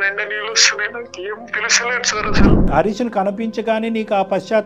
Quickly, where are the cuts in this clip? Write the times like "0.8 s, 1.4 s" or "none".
2.7 s